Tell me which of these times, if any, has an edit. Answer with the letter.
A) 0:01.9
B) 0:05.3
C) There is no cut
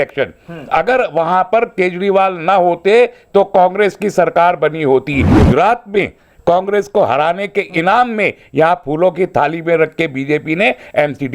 B